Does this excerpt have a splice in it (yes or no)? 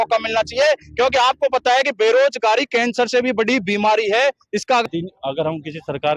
yes